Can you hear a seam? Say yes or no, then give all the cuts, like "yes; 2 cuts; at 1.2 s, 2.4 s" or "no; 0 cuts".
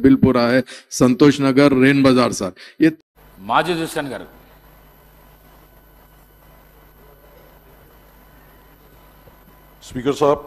yes; 1 cut; at 3.0 s